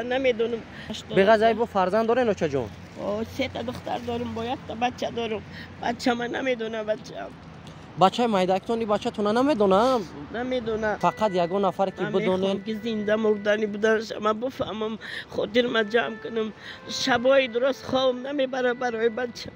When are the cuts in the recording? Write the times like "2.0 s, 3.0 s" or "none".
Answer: 0.9 s, 11.0 s